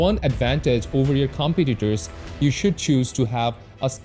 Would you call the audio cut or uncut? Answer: uncut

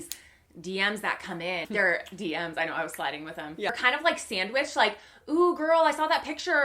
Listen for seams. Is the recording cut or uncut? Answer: cut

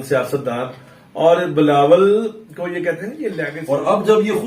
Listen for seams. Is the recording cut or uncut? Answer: cut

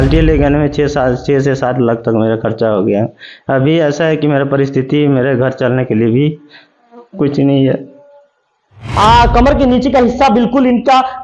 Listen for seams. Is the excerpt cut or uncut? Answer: cut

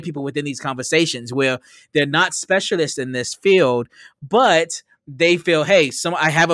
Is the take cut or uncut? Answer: uncut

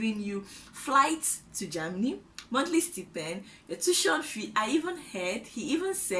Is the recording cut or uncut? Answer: uncut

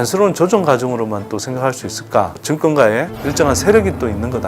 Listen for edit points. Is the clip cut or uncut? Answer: cut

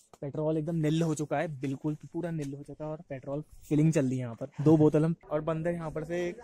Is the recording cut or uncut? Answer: cut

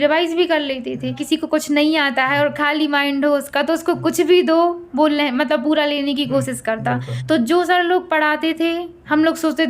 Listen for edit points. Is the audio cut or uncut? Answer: cut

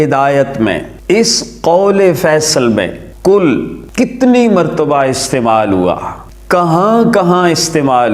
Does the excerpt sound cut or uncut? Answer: cut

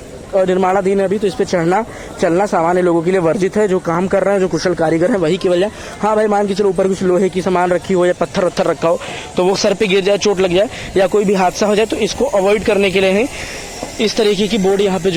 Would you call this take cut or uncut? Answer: uncut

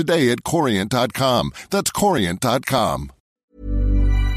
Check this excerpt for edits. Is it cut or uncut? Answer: cut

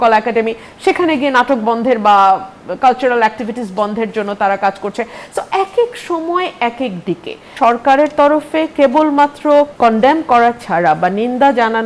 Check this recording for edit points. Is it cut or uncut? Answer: cut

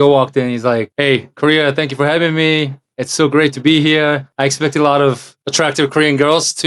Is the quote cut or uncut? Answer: cut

